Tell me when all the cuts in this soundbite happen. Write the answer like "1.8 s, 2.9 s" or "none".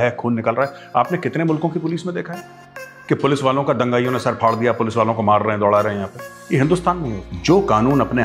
7.1 s